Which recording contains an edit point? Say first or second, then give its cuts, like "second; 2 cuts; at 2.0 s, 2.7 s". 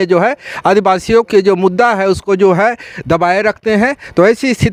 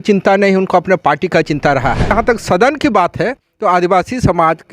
second; 1 cut; at 2.1 s